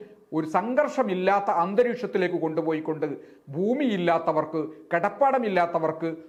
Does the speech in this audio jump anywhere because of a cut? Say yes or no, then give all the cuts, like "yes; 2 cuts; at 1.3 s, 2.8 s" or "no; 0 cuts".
no; 0 cuts